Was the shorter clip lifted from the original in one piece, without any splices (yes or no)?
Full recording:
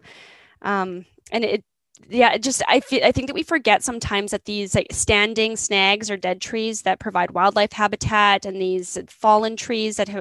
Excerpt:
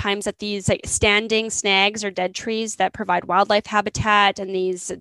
yes